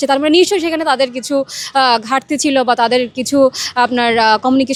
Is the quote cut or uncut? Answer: uncut